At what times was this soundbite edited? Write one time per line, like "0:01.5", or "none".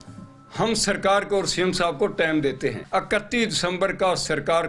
0:02.8